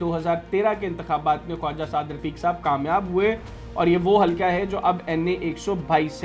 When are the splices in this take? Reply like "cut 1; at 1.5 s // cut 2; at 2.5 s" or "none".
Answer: none